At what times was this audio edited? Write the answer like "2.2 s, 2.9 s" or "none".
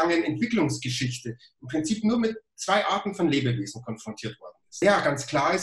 4.6 s